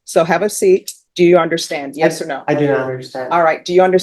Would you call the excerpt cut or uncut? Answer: cut